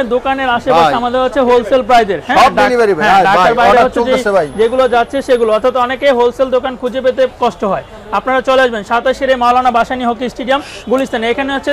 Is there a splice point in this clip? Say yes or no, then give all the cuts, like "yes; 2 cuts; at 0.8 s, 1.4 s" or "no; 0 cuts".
no; 0 cuts